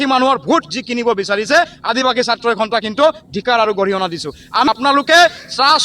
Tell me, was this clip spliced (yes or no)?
yes